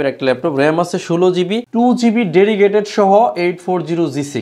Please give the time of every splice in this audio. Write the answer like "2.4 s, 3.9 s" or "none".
1.7 s